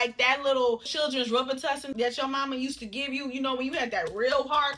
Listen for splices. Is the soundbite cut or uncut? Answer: cut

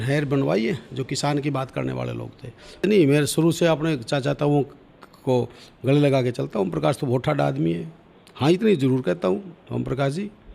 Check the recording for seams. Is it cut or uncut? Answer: cut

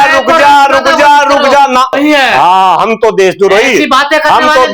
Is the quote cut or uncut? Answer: cut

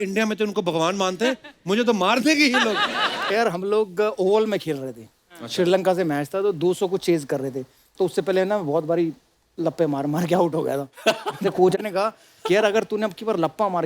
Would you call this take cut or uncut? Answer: cut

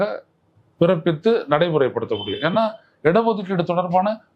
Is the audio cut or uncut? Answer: uncut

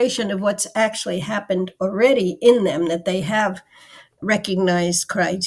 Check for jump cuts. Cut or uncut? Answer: cut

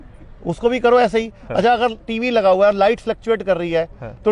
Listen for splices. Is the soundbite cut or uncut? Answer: uncut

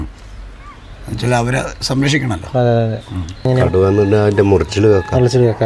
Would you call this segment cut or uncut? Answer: cut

